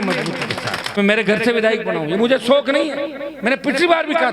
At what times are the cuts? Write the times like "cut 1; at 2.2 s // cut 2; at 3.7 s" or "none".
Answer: cut 1; at 1.0 s